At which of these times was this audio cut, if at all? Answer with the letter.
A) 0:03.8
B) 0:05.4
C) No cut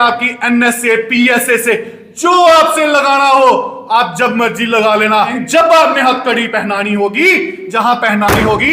B